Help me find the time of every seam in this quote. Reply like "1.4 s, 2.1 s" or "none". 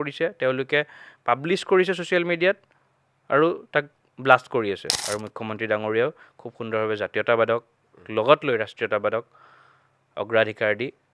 4.9 s